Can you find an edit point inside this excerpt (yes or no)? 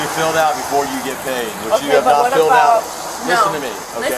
no